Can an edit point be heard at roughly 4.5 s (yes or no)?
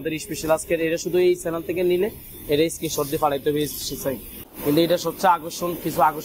yes